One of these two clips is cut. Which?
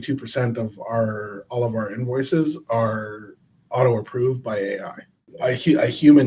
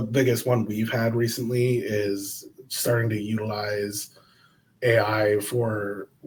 first; 1 cut; at 5.3 s

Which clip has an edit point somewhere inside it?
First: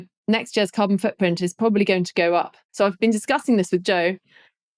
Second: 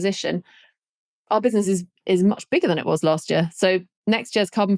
first; 1 cut; at 2.6 s

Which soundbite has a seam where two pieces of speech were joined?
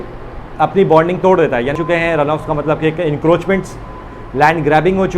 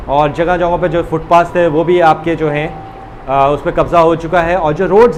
first; 1 cut; at 1.7 s

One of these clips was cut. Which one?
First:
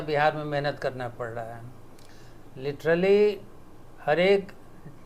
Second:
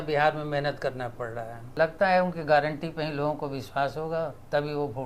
second; 1 cut; at 1.6 s

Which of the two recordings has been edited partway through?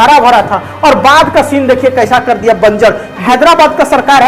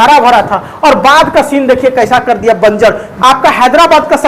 first; 1 cut; at 3.2 s

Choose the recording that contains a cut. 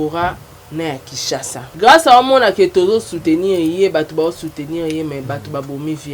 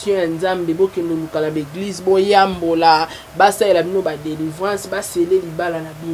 first; 1 cut; at 1.7 s

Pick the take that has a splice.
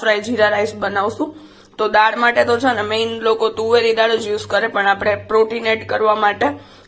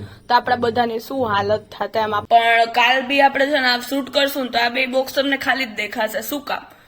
second; 1 cut; at 2.2 s

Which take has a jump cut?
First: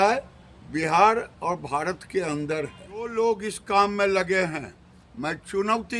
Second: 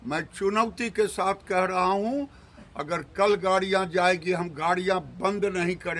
first; 1 cut; at 3.1 s

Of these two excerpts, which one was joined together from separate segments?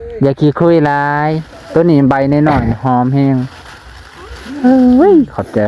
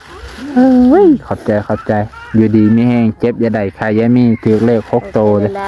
first; 1 cut; at 1.8 s

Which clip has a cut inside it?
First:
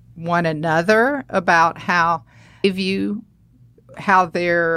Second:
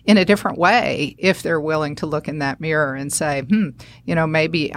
first; 1 cut; at 2.6 s

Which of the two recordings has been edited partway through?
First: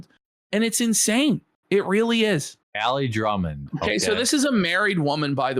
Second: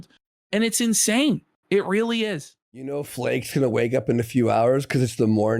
second; 1 cut; at 2.8 s

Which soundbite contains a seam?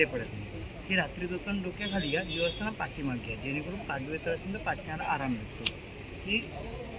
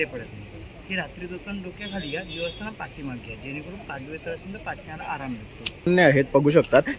second; 1 cut; at 5.9 s

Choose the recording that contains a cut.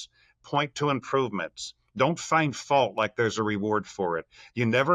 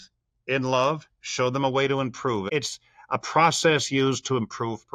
second; 1 cut; at 2.5 s

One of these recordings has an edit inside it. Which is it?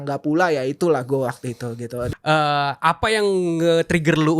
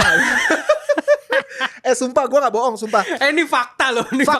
first; 1 cut; at 2.0 s

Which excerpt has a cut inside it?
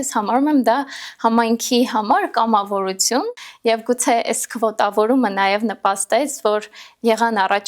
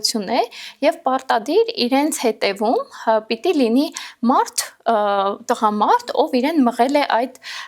first; 1 cut; at 3.4 s

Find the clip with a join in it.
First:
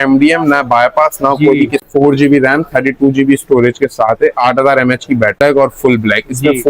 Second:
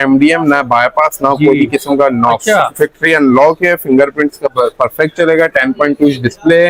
first; 2 cuts; at 1.9 s, 5.4 s

